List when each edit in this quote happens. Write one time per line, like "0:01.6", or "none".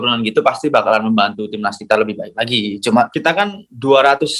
0:03.1